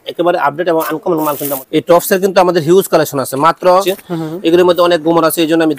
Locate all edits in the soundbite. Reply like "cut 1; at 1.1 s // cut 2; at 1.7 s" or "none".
cut 1; at 1.6 s // cut 2; at 3.9 s